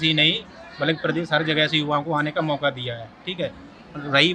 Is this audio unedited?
yes; 0 cuts

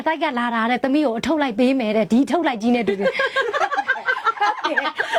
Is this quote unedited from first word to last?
yes; 0 cuts

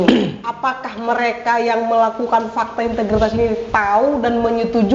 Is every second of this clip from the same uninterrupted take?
yes; 0 cuts

